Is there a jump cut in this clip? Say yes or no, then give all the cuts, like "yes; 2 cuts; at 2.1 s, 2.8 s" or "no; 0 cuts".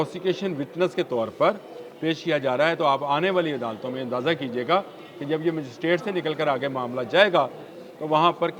no; 0 cuts